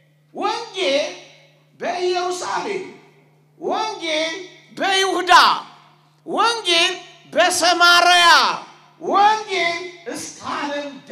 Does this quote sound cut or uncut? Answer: uncut